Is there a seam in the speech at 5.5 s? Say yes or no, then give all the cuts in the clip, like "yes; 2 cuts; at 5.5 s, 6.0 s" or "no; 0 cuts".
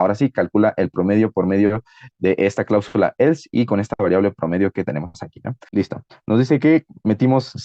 yes; 1 cut; at 5.5 s